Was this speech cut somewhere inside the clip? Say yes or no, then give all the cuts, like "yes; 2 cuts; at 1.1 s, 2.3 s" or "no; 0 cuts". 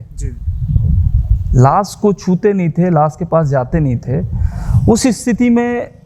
no; 0 cuts